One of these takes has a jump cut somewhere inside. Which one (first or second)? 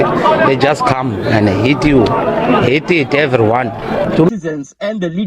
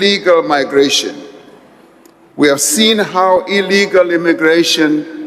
first